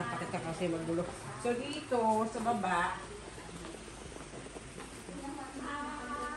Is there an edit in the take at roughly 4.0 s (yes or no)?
no